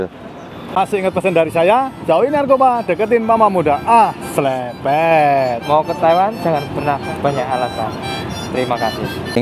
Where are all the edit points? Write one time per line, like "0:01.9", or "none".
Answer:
none